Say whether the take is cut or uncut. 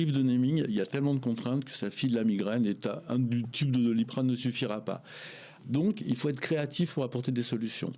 uncut